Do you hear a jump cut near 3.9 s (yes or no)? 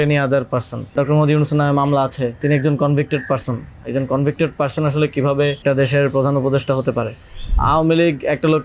no